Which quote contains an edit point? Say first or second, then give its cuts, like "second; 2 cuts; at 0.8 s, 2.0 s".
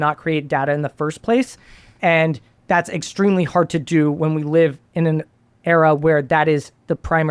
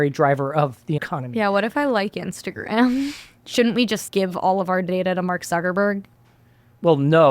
second; 2 cuts; at 1.0 s, 3.3 s